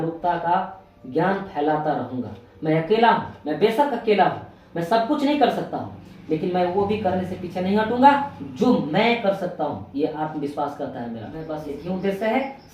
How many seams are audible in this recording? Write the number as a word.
one